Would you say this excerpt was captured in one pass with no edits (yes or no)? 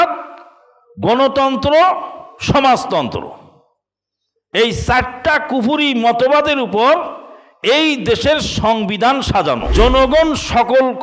no